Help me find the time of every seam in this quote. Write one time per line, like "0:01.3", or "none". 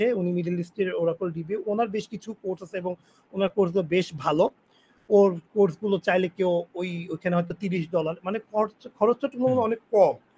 none